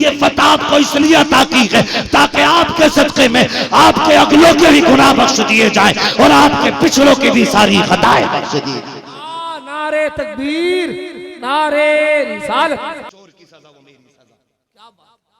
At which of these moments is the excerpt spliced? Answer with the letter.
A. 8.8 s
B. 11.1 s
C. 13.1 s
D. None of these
C